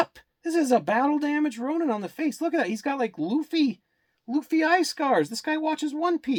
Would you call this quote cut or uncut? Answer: uncut